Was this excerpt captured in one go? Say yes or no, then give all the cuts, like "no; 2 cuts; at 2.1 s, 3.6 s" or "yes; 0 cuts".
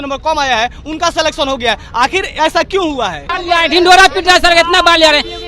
no; 1 cut; at 3.4 s